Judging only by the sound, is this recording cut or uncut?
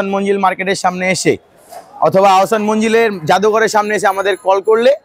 uncut